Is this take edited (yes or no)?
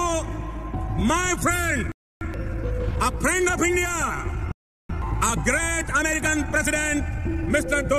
no